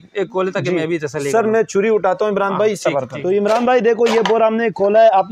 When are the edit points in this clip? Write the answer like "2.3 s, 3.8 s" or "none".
3.1 s